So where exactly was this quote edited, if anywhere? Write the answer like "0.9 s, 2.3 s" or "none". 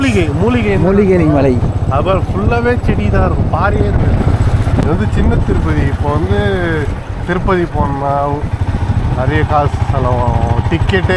4.8 s